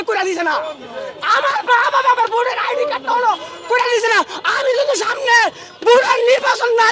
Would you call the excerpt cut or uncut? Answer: uncut